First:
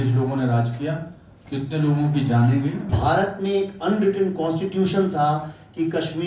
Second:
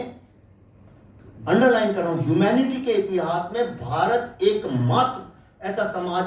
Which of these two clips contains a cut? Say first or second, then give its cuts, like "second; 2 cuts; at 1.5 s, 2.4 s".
first; 1 cut; at 2.9 s